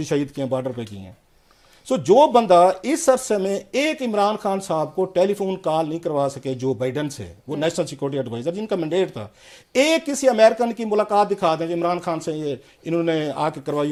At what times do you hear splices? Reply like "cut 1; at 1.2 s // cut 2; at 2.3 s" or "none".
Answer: none